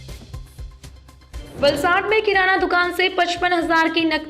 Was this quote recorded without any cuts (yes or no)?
no